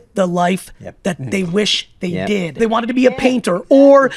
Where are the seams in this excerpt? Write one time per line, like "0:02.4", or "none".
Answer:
0:02.6